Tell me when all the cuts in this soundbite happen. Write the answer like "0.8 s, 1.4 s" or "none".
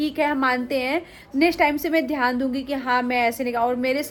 none